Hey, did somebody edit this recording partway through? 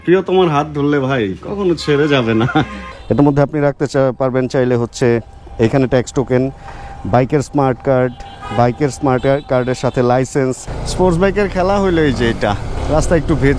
yes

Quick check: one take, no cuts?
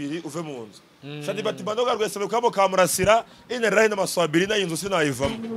yes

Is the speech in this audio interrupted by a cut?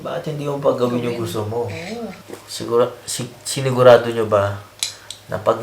yes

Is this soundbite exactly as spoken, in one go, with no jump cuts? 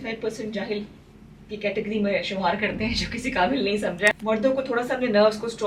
no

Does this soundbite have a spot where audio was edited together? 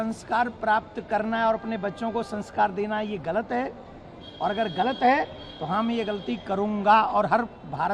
no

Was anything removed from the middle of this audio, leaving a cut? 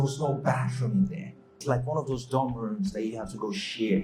yes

